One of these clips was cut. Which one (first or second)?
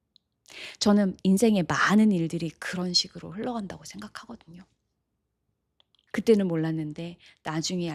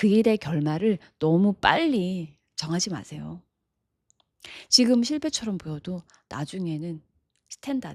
first